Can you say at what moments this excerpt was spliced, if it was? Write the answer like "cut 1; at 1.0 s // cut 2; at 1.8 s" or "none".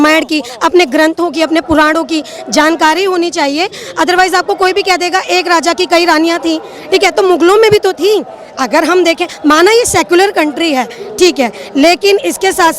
none

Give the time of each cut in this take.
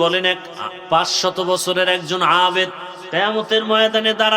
cut 1; at 2.9 s

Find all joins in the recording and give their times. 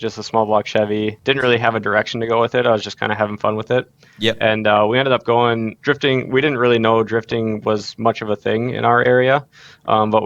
cut 1; at 1.2 s // cut 2; at 5.7 s

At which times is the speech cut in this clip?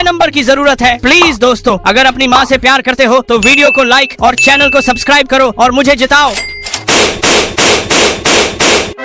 none

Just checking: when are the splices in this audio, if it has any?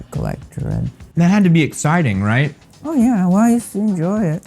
cut 1; at 1.0 s

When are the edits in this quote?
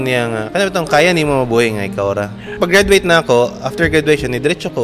cut 1; at 2.4 s

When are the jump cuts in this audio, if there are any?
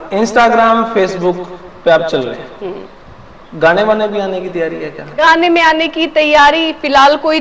cut 1; at 5.0 s

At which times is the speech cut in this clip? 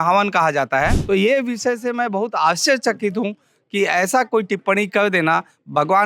cut 1; at 1.0 s

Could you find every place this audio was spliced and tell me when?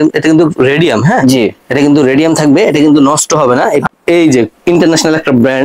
cut 1; at 3.9 s

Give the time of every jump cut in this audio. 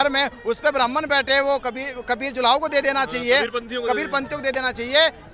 none

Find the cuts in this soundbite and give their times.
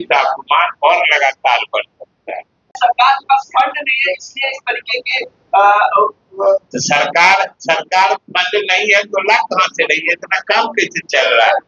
cut 1; at 2.7 s

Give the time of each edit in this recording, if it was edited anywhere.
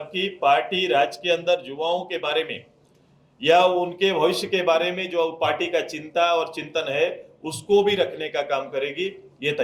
none

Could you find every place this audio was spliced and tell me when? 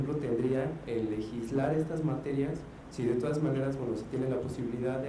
cut 1; at 3.4 s

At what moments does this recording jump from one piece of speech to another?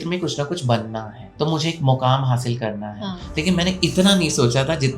cut 1; at 1.2 s

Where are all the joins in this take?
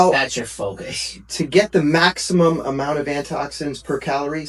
none

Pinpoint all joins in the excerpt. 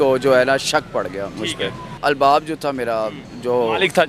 cut 1; at 1.9 s

